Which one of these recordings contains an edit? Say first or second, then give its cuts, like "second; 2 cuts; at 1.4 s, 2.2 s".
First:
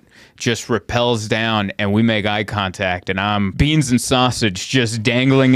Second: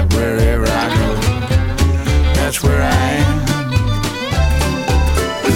first; 1 cut; at 3.5 s